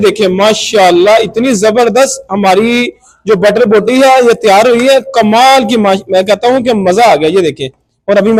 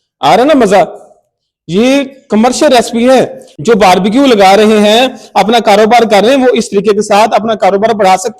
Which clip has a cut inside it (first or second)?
second